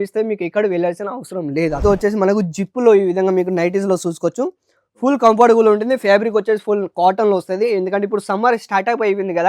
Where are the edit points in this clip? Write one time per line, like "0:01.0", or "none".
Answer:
0:01.8